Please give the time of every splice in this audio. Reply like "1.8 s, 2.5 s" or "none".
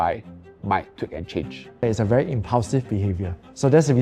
1.8 s